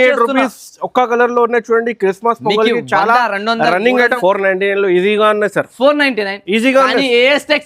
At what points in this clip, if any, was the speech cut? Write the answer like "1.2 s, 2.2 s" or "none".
4.1 s